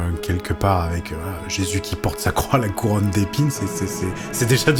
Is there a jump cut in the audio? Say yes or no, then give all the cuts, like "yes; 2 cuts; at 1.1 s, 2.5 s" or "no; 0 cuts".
no; 0 cuts